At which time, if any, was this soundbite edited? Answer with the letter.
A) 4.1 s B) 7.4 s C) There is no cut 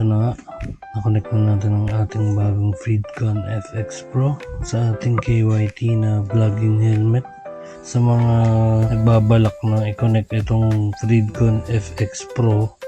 B